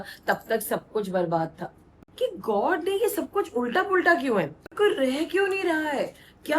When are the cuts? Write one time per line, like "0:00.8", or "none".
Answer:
0:02.0
0:04.7